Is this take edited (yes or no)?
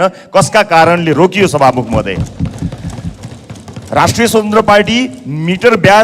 no